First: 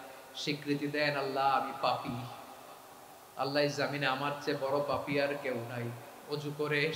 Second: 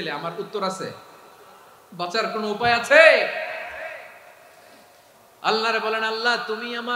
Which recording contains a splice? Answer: second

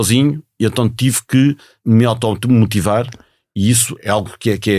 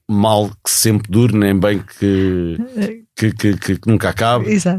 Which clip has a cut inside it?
first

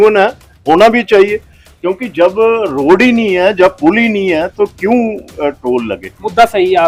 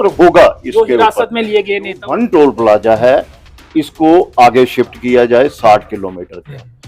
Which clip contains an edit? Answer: second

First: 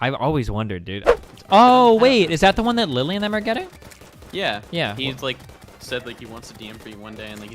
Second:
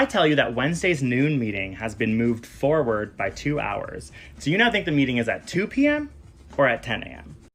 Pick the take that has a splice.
first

